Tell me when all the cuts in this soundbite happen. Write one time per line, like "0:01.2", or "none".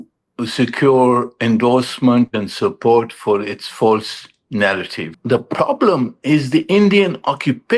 0:05.1